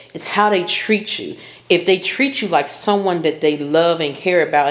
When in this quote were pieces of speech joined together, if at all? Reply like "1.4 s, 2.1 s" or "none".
none